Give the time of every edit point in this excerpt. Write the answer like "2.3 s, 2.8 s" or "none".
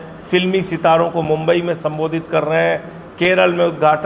none